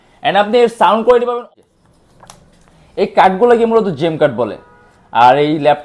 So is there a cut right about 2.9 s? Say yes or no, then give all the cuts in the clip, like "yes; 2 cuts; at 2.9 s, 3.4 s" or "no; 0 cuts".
no; 1 cut; at 1.4 s